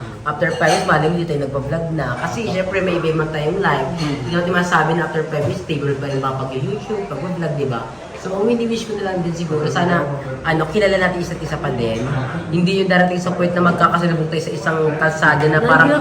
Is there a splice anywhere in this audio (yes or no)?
no